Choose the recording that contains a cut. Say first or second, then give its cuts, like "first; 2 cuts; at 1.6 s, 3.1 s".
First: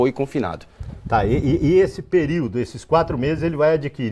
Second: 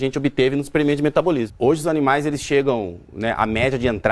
second; 1 cut; at 1.5 s